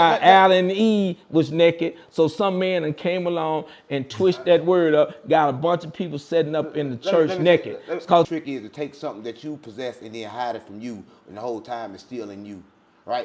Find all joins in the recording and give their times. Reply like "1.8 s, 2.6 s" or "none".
8.3 s